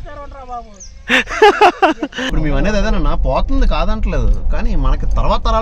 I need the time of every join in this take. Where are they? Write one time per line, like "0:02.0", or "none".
0:02.3